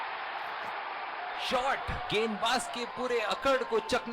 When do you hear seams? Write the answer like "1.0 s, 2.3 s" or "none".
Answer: 1.4 s